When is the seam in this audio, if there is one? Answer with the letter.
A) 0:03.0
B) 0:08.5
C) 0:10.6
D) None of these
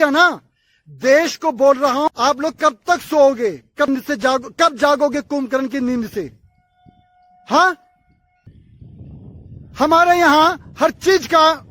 B